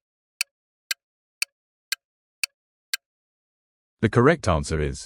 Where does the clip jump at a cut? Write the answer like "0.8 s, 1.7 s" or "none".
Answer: 3.2 s